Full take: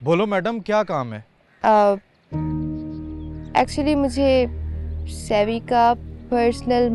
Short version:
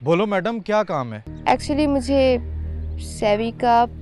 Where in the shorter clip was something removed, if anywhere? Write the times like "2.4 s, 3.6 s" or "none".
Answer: 1.2 s

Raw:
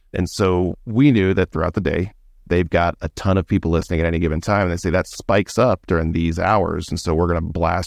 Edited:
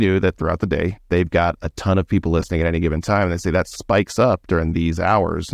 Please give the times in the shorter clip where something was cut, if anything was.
1.0 s

